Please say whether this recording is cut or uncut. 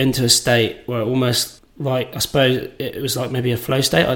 cut